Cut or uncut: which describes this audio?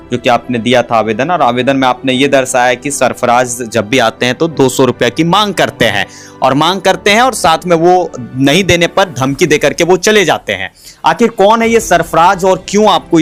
uncut